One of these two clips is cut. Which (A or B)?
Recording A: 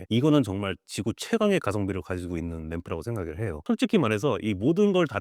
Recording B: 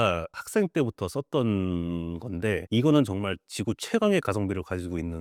A